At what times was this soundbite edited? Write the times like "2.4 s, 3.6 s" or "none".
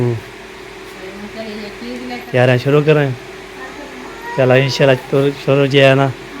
2.3 s